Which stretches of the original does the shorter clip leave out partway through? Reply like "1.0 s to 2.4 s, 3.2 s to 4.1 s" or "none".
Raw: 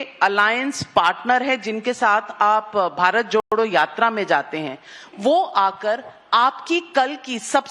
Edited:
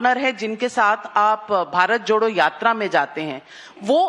3.4 s to 3.5 s